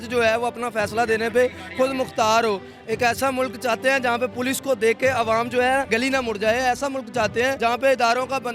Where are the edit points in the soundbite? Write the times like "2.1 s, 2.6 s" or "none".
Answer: 5.9 s, 7.6 s